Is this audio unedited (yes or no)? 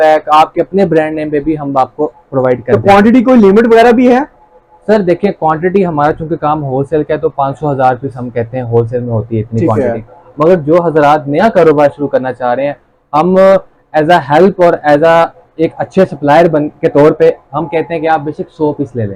yes